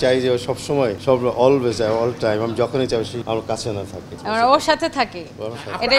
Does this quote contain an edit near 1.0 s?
yes; 2 cuts; at 1.0 s, 3.2 s

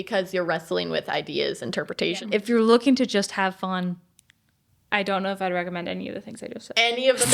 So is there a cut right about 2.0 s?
yes; 1 cut; at 2.0 s

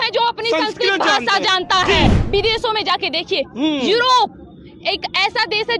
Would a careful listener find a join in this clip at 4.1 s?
no; 1 cut; at 2.1 s

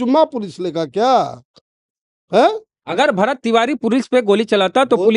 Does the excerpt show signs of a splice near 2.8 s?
yes; 1 cut; at 2.8 s

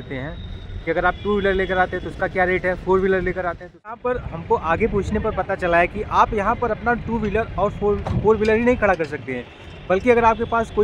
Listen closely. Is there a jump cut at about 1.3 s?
no; 1 cut; at 4.0 s

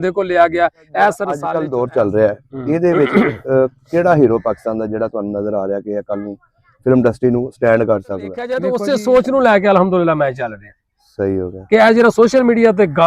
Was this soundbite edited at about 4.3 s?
no; 2 cuts; at 1.5 s, 8.6 s

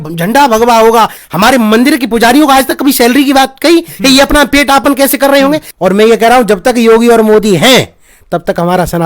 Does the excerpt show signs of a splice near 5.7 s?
yes; 2 cuts; at 1.2 s, 5.7 s

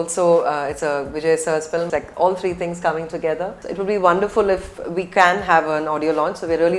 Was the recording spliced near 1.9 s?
yes; 2 cuts; at 1.9 s, 3.6 s

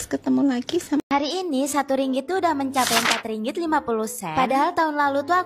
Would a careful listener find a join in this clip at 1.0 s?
yes; 1 cut; at 1.0 s

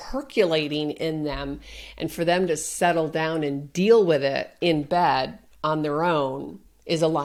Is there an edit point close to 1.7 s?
no; 0 cuts

